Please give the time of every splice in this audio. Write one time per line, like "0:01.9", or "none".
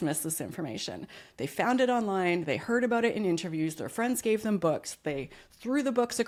none